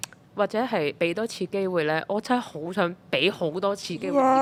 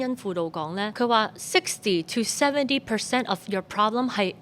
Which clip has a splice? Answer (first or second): second